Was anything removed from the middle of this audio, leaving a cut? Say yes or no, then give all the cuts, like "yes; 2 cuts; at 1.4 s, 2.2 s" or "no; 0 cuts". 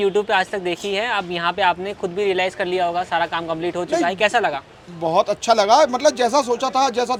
no; 0 cuts